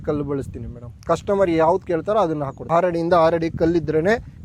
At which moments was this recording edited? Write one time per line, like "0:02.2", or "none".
0:02.5